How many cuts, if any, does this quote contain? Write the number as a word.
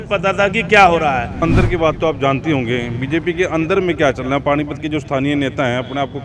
one